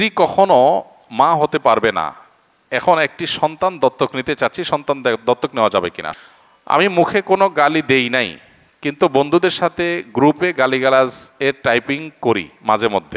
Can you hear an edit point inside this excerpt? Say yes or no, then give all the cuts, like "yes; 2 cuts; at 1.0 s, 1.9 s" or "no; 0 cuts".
yes; 1 cut; at 6.0 s